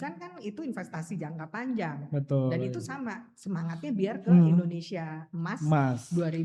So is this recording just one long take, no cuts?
yes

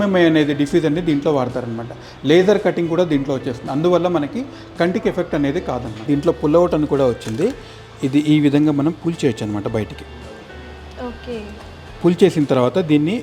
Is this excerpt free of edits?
no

